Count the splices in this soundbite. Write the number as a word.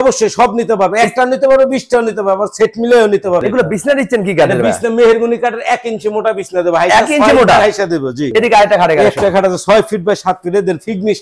two